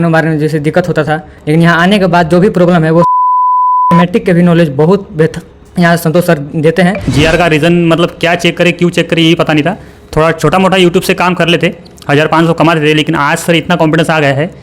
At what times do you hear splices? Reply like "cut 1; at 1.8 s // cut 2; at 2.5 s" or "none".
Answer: cut 1; at 7.0 s